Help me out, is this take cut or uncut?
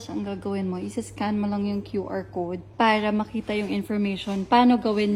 uncut